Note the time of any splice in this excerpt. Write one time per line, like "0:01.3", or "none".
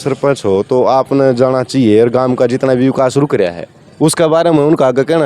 none